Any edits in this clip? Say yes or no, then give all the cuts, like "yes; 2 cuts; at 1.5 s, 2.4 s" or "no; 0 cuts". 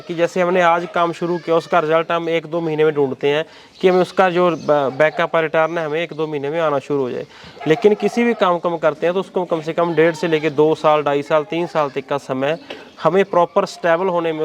no; 0 cuts